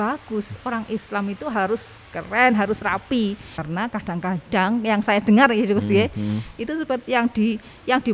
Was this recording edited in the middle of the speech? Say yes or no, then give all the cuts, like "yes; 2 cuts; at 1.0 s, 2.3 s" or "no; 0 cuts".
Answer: yes; 1 cut; at 3.6 s